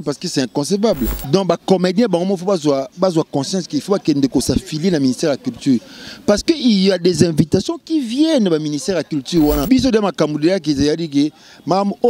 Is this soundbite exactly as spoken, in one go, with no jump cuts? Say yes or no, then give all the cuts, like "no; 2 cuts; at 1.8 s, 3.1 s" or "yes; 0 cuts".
no; 2 cuts; at 1.2 s, 9.7 s